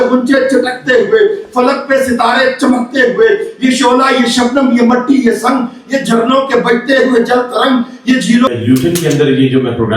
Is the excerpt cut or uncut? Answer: cut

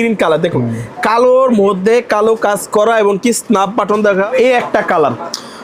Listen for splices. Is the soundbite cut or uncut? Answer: cut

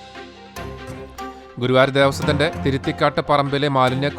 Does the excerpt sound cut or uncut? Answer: cut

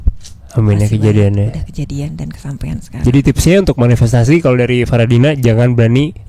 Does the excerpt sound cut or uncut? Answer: uncut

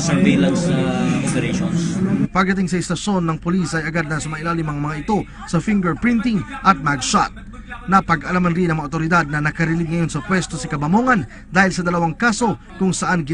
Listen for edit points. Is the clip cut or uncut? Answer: uncut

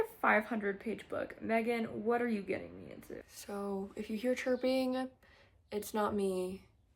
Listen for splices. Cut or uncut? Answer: cut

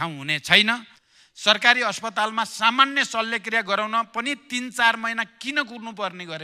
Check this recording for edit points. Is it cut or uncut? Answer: cut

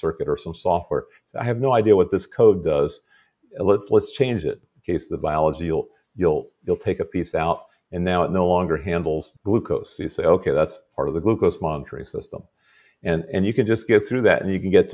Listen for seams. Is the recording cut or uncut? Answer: cut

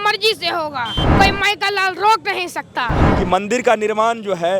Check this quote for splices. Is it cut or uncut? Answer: cut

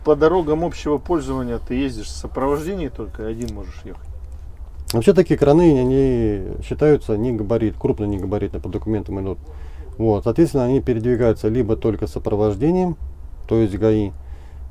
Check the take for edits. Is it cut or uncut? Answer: uncut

